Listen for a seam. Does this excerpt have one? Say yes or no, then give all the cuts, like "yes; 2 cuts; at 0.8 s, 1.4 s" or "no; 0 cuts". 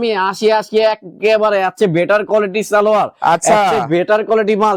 no; 0 cuts